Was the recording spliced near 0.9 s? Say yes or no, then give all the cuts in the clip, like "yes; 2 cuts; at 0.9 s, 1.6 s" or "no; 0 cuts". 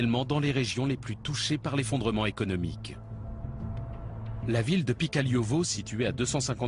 yes; 1 cut; at 0.9 s